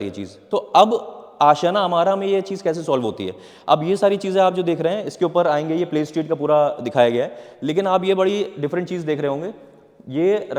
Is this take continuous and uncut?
yes; 0 cuts

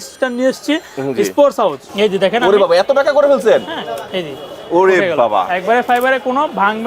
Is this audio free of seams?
no; 1 cut; at 1.9 s

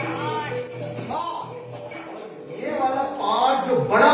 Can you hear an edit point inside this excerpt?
yes; 1 cut; at 2.7 s

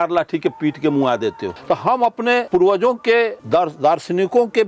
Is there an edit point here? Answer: yes; 3 cuts; at 1.5 s, 2.5 s, 3.4 s

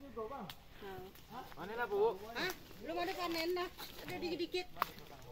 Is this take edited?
no; 0 cuts

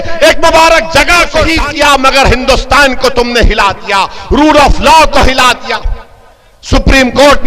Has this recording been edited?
yes; 1 cut; at 1.5 s

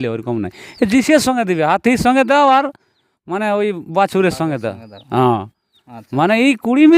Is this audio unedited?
yes; 0 cuts

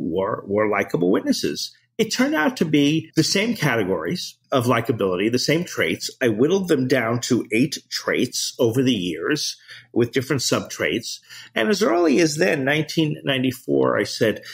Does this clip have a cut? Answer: yes; 2 cuts; at 3.1 s, 4.3 s

